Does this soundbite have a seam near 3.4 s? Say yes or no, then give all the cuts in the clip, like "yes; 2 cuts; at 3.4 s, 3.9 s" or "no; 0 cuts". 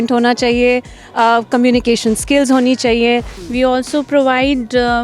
yes; 1 cut; at 3.4 s